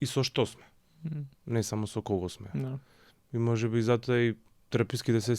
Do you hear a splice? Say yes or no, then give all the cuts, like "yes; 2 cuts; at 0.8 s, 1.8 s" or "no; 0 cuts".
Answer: no; 0 cuts